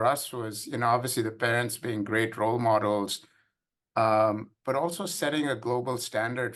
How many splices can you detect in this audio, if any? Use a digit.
0